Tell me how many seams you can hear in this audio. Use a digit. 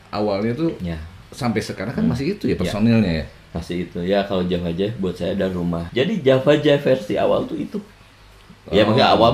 1